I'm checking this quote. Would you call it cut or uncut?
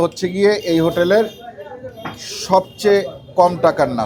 uncut